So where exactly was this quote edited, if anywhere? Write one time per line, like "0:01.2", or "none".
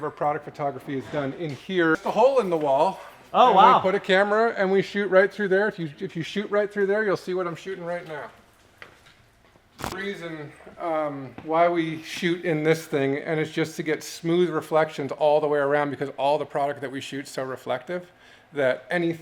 none